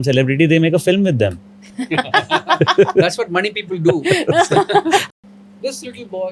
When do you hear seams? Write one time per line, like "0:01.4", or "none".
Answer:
0:05.0